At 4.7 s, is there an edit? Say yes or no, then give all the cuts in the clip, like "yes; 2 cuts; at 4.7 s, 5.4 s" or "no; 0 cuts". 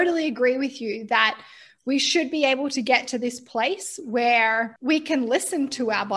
yes; 1 cut; at 4.7 s